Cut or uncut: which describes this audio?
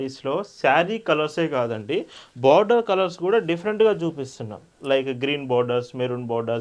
uncut